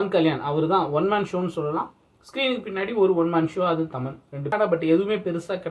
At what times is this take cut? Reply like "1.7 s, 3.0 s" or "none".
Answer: 4.4 s